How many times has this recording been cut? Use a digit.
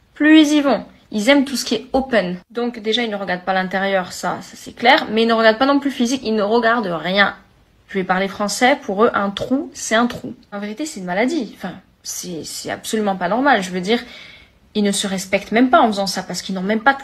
3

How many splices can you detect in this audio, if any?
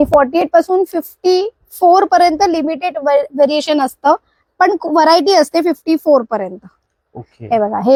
0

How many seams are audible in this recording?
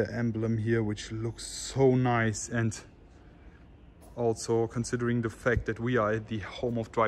0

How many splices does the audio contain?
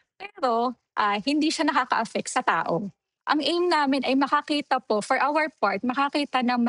1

